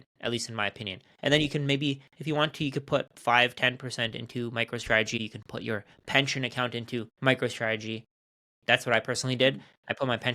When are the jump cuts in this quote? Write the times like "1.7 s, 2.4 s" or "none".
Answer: 5.2 s, 7.1 s